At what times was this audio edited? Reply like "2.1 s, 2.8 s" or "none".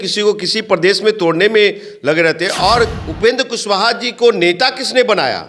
3.0 s